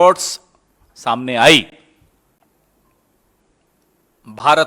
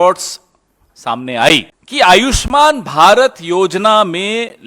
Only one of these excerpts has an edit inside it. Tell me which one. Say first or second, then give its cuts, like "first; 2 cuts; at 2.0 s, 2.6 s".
second; 1 cut; at 1.8 s